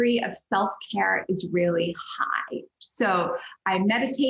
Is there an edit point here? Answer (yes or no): no